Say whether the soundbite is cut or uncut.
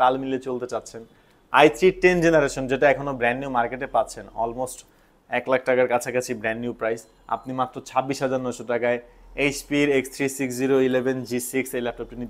uncut